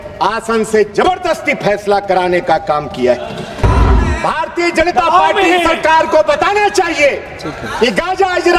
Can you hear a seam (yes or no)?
yes